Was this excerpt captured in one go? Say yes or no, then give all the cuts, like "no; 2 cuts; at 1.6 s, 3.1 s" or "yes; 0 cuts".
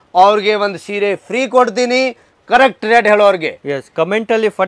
yes; 0 cuts